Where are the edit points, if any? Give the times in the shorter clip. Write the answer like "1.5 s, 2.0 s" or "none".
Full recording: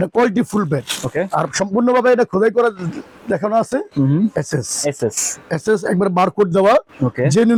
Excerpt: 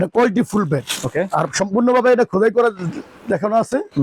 none